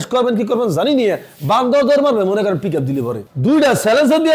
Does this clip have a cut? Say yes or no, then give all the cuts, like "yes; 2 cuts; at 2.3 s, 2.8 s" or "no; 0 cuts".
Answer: yes; 1 cut; at 3.2 s